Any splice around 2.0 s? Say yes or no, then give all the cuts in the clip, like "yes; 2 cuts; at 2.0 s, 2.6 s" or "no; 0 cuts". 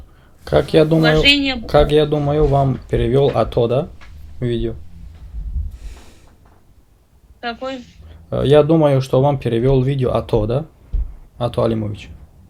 no; 0 cuts